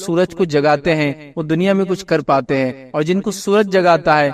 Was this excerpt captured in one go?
yes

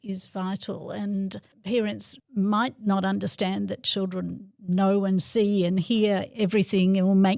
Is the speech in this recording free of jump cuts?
no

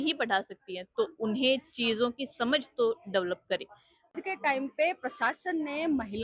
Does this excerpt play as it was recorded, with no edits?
no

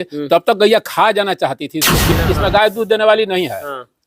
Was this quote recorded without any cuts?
no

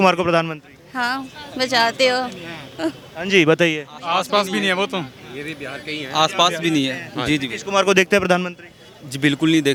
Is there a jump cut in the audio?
no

